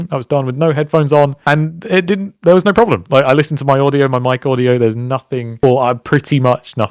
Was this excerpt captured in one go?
yes; 0 cuts

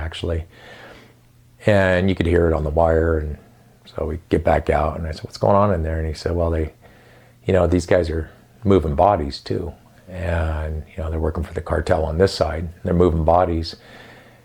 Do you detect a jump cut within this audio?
no; 0 cuts

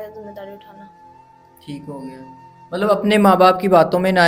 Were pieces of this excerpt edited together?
no; 0 cuts

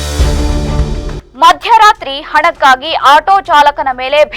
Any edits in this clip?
yes; 1 cut; at 1.1 s

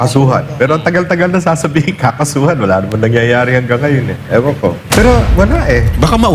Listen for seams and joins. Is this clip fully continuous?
no; 1 cut; at 4.8 s

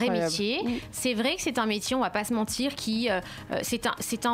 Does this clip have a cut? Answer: no; 0 cuts

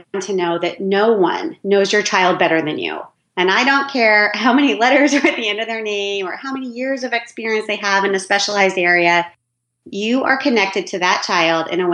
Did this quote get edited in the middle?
no; 0 cuts

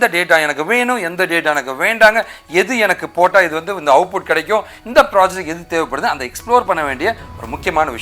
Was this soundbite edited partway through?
no; 0 cuts

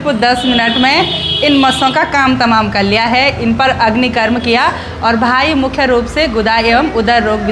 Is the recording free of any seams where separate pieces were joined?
yes; 0 cuts

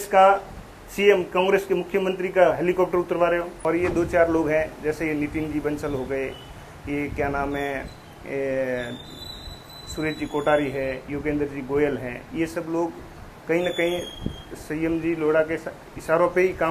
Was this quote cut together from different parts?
yes; 1 cut; at 3.5 s

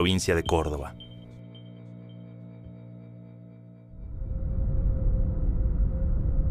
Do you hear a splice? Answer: no; 0 cuts

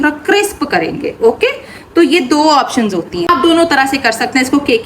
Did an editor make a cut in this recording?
yes; 1 cut; at 3.3 s

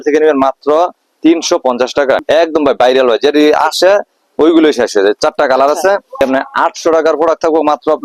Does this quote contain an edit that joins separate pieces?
yes; 2 cuts; at 2.2 s, 6.2 s

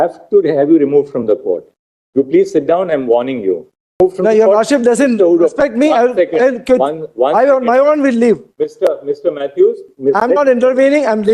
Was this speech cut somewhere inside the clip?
yes; 2 cuts; at 3.9 s, 9.9 s

